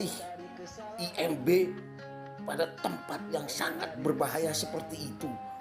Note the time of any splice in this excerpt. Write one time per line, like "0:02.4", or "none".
none